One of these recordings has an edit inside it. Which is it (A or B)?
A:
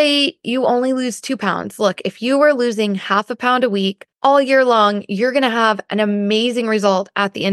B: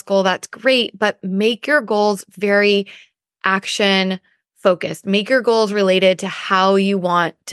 A